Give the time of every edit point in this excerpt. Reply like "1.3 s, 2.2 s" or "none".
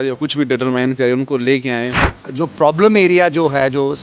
2.0 s